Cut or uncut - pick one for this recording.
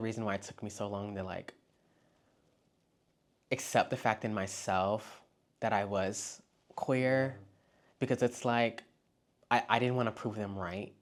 uncut